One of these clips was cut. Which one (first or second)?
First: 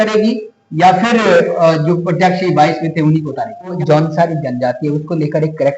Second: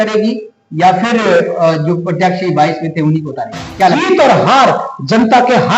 first